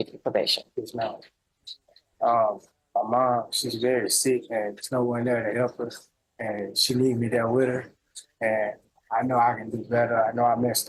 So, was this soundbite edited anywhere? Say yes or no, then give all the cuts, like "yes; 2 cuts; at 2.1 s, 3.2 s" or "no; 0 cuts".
no; 0 cuts